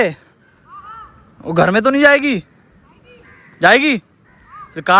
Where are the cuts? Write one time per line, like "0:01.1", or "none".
none